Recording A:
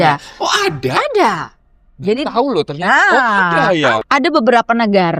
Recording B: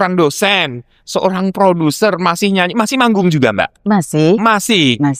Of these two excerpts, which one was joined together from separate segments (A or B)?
A